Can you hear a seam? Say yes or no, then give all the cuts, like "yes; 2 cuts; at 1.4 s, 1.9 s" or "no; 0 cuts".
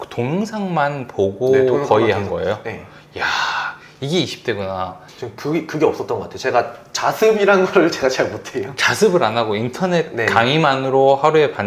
yes; 1 cut; at 5.0 s